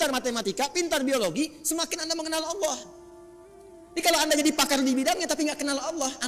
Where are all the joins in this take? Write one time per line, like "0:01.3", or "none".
none

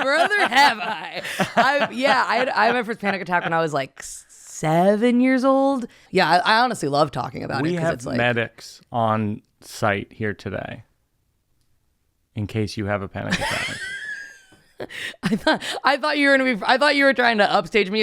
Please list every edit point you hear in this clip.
0:06.0

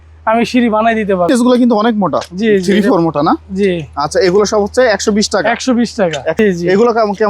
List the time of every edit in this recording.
0:01.3
0:06.4

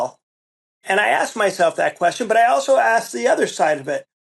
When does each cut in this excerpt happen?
none

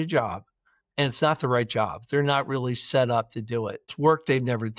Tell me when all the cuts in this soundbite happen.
0:03.9

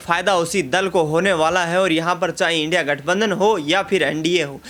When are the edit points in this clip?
none

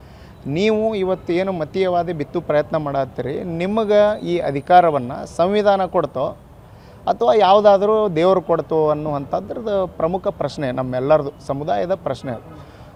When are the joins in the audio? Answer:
none

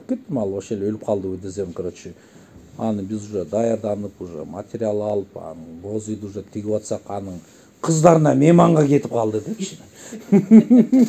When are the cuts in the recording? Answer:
none

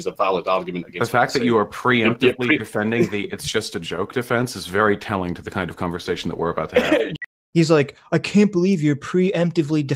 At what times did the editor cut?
0:07.1

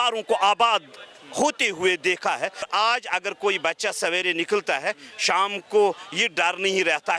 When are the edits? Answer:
0:02.7

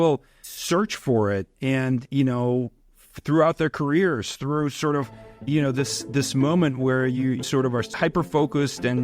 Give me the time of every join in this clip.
0:07.4

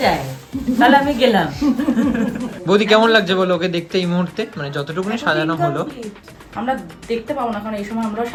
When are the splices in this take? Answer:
none

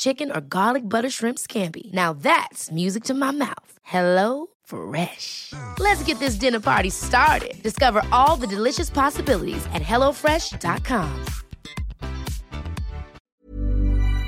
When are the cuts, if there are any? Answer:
0:13.1

